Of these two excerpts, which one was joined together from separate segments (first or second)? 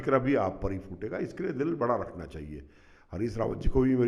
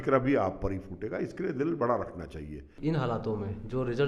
second